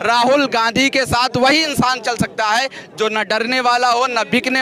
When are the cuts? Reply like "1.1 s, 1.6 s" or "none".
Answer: none